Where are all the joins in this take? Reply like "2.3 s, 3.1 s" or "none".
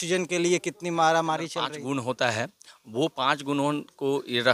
1.7 s